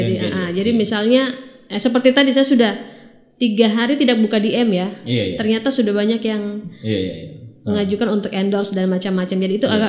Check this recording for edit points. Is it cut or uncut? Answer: uncut